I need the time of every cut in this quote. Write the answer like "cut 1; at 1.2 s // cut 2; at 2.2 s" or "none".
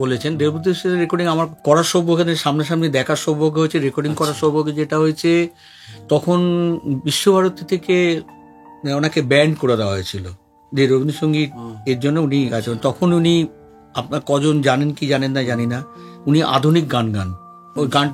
none